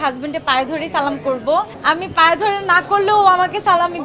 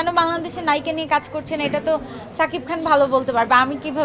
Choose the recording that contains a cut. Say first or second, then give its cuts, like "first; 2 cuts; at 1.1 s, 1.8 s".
first; 1 cut; at 1.7 s